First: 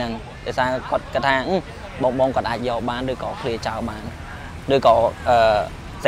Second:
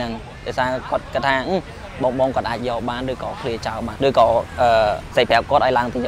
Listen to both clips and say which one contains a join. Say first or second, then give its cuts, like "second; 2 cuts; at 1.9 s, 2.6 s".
second; 2 cuts; at 3.9 s, 5.0 s